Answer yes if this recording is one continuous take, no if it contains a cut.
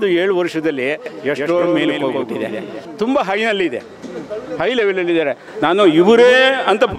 no